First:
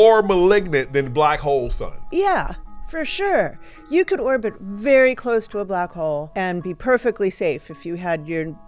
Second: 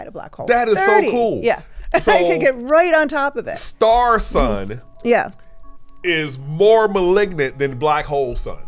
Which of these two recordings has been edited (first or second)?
first